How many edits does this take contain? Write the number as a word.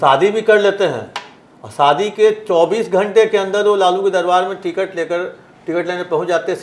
zero